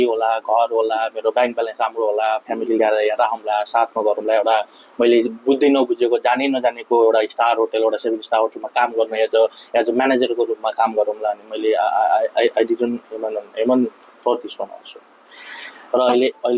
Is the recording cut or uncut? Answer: uncut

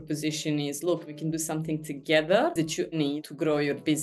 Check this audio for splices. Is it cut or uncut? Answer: cut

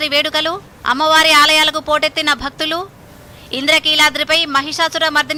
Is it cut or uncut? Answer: uncut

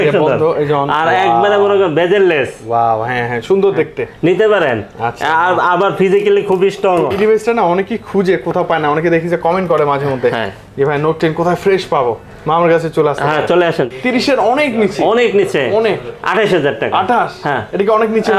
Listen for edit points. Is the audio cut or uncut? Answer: cut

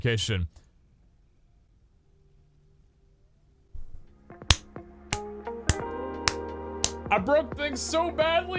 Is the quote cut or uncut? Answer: uncut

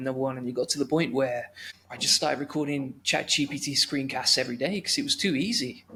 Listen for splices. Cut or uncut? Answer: uncut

